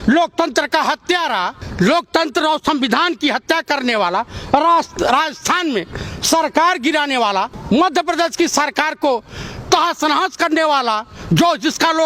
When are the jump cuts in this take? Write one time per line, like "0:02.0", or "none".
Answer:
0:01.6
0:07.6